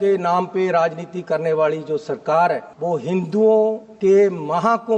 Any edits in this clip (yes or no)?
yes